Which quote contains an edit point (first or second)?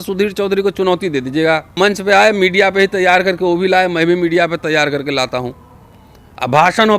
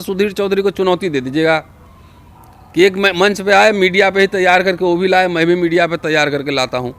first